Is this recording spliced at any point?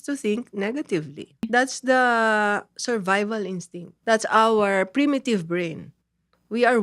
yes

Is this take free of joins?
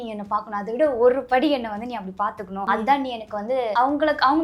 no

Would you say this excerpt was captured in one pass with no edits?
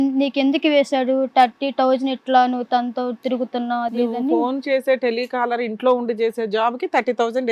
yes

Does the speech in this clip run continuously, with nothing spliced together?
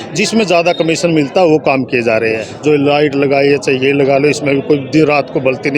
no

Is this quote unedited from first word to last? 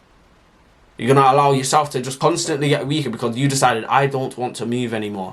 no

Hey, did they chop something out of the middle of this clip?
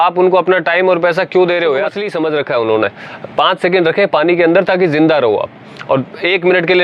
yes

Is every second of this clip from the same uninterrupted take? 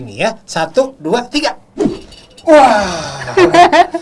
no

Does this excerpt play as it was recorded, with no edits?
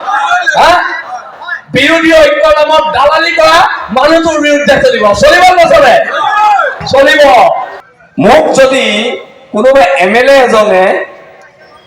no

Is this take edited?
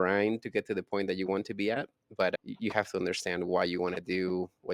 no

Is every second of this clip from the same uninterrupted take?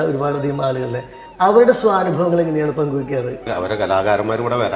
no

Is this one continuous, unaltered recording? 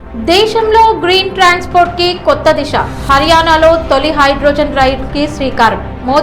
yes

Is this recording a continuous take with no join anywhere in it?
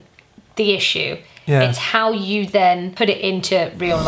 no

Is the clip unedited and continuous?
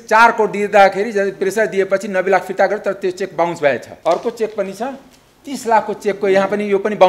no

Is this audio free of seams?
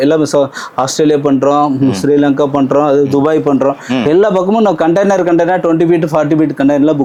yes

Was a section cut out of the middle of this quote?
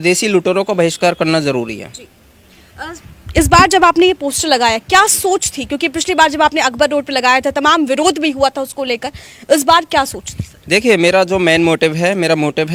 no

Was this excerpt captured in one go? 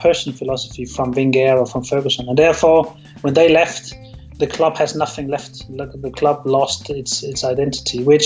yes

